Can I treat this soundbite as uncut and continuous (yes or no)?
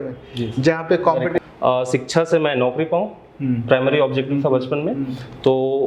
no